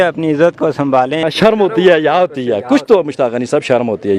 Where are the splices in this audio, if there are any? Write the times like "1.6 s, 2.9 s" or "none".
1.1 s